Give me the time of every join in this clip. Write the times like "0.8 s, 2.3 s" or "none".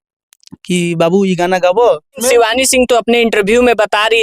2.2 s